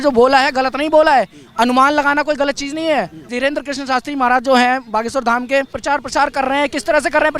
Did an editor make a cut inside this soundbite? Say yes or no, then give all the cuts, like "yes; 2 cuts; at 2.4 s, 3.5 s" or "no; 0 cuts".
yes; 2 cuts; at 3.3 s, 5.8 s